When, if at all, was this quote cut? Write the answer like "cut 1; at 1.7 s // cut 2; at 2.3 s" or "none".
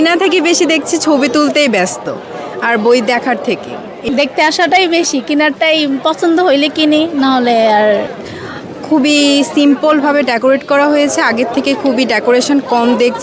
cut 1; at 4.1 s // cut 2; at 8.0 s